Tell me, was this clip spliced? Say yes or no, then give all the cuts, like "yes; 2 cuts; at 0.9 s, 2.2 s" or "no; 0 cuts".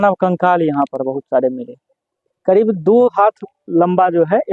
yes; 1 cut; at 2.3 s